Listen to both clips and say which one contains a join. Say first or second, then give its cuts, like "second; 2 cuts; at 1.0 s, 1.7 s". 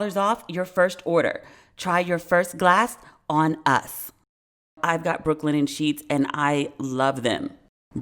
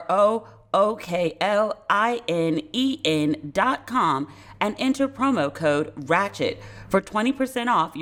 first; 1 cut; at 4.8 s